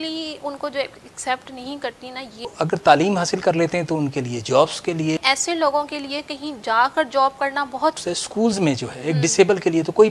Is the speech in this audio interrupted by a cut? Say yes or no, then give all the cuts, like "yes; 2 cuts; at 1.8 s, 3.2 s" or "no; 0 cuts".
yes; 3 cuts; at 2.5 s, 5.2 s, 8.0 s